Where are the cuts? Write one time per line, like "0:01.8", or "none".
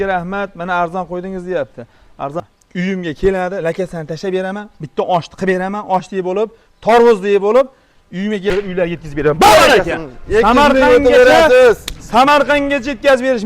0:02.4
0:08.5